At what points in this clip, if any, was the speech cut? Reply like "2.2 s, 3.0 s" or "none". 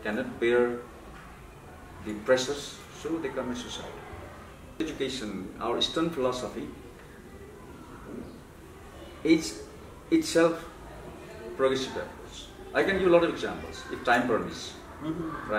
4.8 s